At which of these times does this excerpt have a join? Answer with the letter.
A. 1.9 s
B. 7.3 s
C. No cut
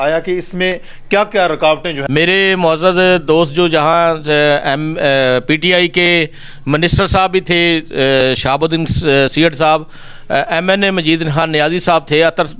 A